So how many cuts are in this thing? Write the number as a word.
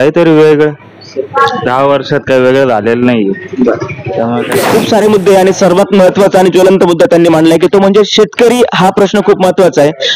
one